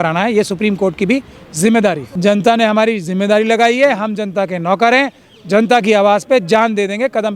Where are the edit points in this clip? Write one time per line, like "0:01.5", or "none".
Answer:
0:02.1